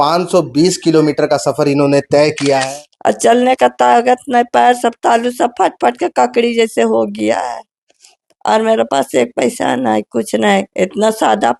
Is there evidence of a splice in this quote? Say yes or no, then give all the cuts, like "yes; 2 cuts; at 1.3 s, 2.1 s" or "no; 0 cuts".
yes; 1 cut; at 2.6 s